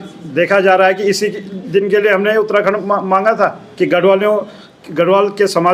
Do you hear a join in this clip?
no; 0 cuts

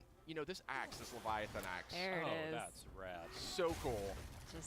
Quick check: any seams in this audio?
no; 0 cuts

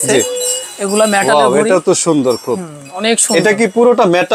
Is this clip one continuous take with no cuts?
yes; 0 cuts

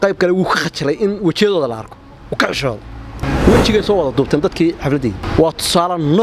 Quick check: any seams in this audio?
yes; 2 cuts; at 3.2 s, 5.2 s

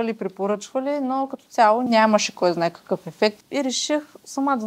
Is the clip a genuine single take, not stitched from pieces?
no; 2 cuts; at 1.9 s, 3.4 s

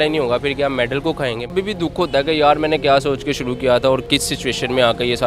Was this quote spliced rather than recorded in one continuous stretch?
yes; 2 cuts; at 1.5 s, 4.0 s

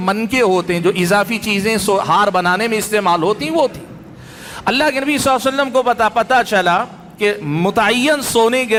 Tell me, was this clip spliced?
no; 0 cuts

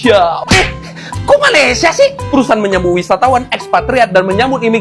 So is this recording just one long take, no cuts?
yes; 0 cuts

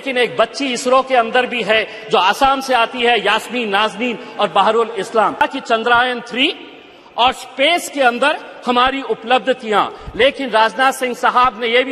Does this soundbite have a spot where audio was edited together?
yes; 1 cut; at 5.4 s

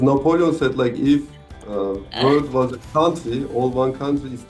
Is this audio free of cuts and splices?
yes; 0 cuts

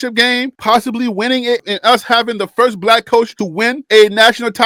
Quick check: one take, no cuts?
yes; 0 cuts

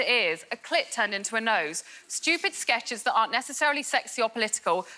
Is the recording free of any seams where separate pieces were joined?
yes; 0 cuts

